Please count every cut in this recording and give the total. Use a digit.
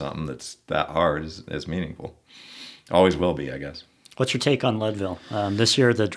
0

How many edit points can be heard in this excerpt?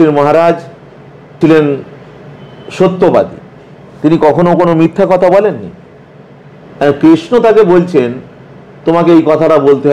1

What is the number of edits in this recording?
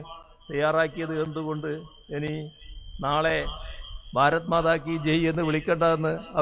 0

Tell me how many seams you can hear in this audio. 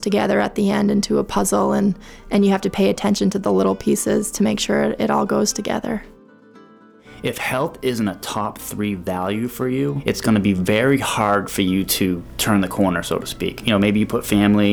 4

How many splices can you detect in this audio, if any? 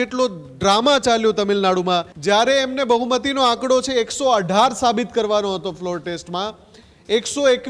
1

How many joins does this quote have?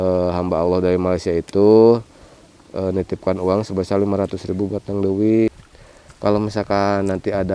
1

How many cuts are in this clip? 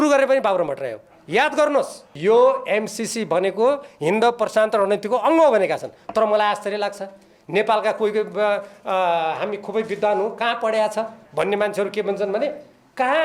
1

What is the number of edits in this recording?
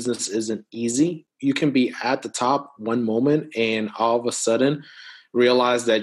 1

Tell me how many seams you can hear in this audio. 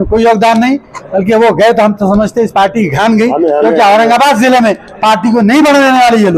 0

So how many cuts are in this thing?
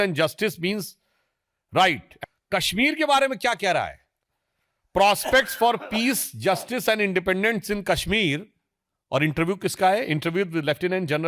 1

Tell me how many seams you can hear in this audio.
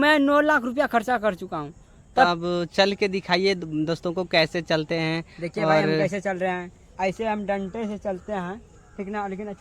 1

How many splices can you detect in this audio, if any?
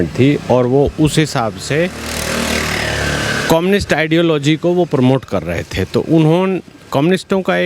0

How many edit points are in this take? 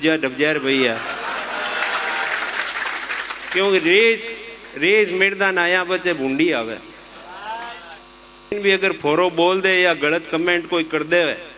1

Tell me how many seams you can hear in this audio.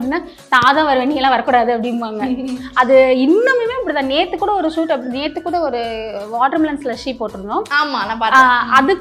0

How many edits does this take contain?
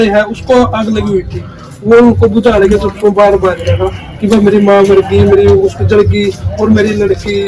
0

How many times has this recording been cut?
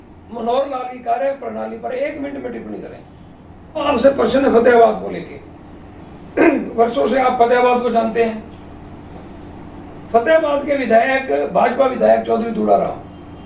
1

